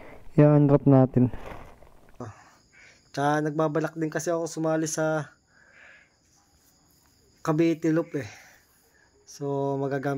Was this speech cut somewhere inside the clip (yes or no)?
yes